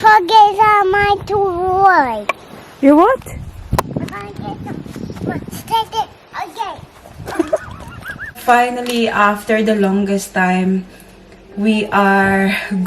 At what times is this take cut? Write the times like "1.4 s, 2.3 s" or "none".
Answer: 8.4 s